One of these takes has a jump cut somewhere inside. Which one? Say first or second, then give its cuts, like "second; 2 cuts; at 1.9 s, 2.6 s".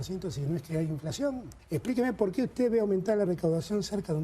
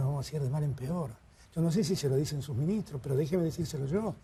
first; 1 cut; at 1.5 s